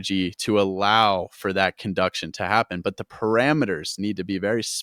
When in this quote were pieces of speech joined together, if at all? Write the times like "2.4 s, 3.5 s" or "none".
none